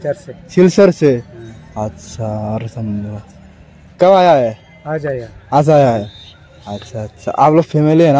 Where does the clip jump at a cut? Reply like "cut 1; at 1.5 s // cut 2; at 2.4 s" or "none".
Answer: none